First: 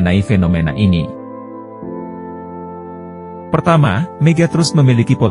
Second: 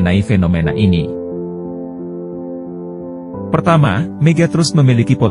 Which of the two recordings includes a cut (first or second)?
second